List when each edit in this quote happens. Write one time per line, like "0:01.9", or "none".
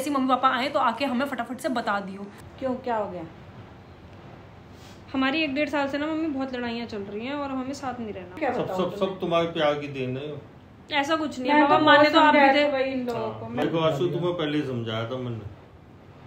0:02.4
0:08.4
0:13.6